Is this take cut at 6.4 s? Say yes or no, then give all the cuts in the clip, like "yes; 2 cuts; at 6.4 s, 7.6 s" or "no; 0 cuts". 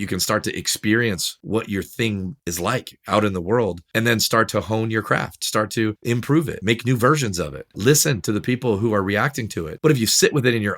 yes; 3 cuts; at 4.3 s, 6.4 s, 9.7 s